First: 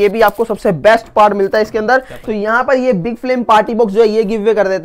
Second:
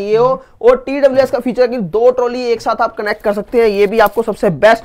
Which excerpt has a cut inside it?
first; 1 cut; at 2.2 s

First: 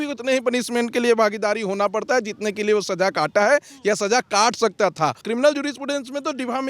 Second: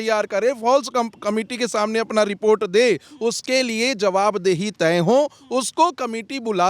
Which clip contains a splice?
first; 1 cut; at 5.2 s

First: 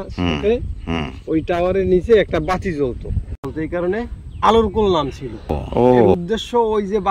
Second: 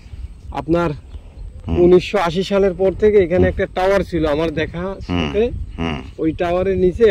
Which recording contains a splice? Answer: first; 2 cuts; at 3.4 s, 6.2 s

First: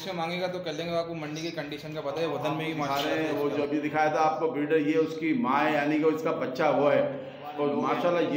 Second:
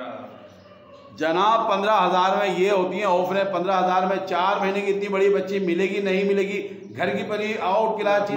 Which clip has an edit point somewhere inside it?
first; 1 cut; at 2.9 s

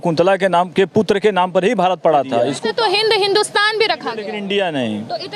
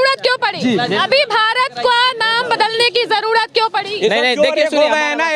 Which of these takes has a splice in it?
first; 2 cuts; at 2.5 s, 4.3 s

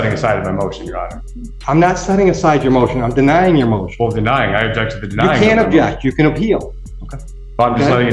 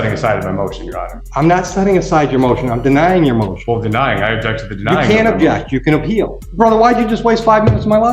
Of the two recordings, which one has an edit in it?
second; 2 cuts; at 1.1 s, 6.4 s

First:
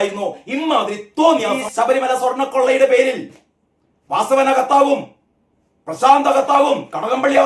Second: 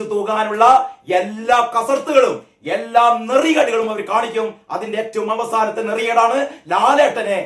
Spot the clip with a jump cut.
first; 1 cut; at 1.6 s

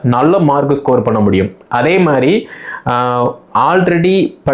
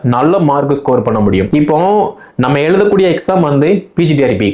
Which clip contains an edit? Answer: second; 1 cut; at 1.5 s

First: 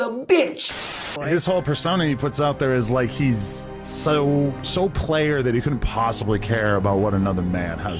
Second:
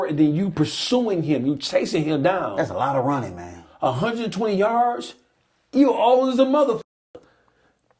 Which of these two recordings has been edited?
first; 1 cut; at 1.2 s

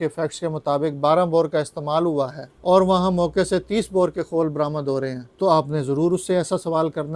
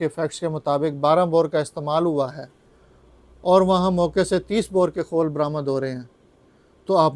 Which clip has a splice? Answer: first; 2 cuts; at 2.4 s, 5.2 s

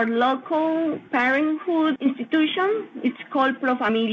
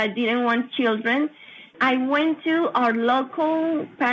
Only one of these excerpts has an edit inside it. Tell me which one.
second; 1 cut; at 1.7 s

